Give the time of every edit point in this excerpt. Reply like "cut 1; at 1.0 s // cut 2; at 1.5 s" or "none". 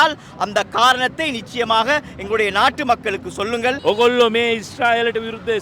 cut 1; at 3.8 s